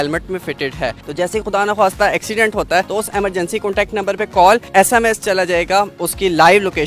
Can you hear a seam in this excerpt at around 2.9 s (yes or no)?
yes